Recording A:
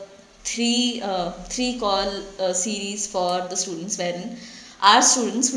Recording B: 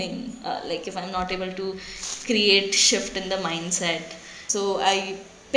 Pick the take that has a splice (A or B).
B